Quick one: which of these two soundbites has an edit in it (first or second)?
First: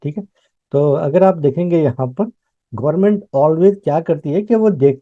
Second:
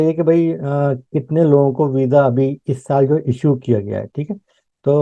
first